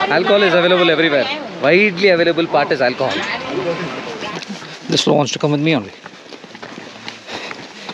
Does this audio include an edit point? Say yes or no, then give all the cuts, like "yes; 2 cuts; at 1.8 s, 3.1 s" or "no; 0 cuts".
yes; 1 cut; at 4.1 s